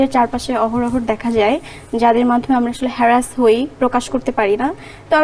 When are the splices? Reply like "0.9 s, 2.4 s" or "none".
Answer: none